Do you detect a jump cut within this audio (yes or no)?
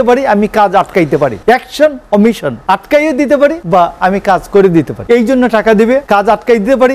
yes